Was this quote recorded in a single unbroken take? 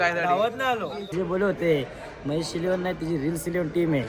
no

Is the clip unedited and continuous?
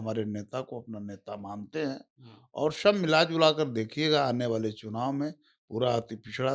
yes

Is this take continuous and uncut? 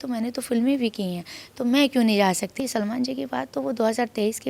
no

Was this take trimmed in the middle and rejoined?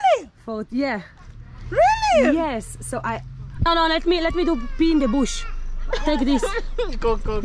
yes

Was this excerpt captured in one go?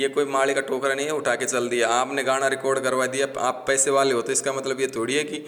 yes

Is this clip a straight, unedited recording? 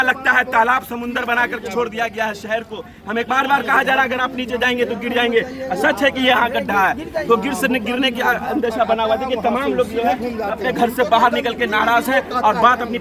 yes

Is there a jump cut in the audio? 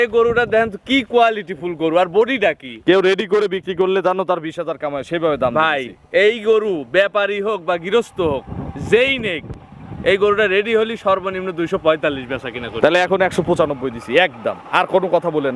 no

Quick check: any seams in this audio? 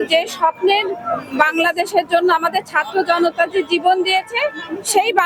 no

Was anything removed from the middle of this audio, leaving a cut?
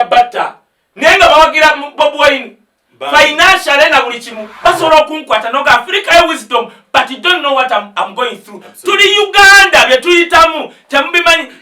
yes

